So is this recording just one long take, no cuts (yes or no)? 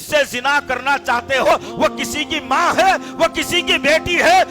no